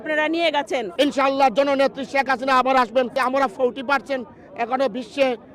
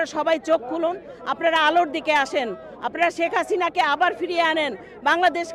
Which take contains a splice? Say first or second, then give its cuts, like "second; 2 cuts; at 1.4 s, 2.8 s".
first; 2 cuts; at 0.9 s, 3.1 s